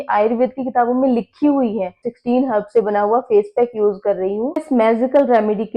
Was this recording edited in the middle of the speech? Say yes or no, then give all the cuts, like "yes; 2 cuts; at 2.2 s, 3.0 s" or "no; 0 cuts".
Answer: yes; 2 cuts; at 2.1 s, 4.6 s